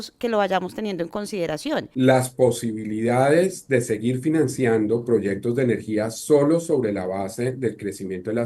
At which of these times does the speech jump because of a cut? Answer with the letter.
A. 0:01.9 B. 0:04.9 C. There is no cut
A